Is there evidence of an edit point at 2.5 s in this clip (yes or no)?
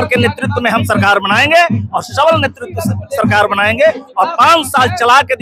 no